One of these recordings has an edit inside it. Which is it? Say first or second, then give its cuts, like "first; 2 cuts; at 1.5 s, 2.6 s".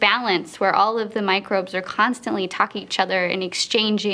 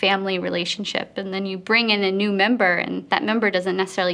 second; 1 cut; at 3.0 s